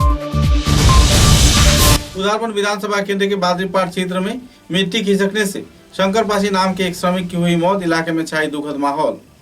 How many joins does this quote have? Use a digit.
1